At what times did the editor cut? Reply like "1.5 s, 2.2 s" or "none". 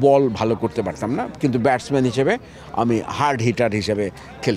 none